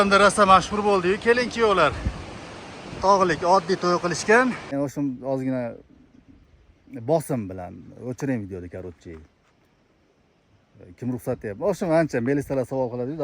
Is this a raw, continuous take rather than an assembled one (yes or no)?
no